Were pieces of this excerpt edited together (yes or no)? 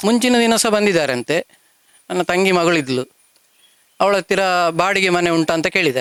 no